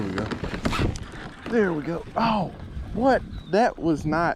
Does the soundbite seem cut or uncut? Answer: uncut